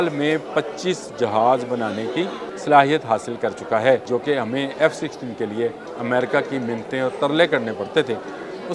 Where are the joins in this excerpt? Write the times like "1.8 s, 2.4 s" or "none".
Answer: 2.5 s, 4.1 s, 5.9 s

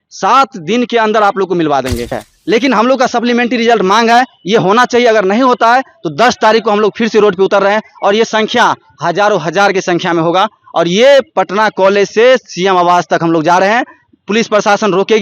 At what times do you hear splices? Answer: 2.2 s

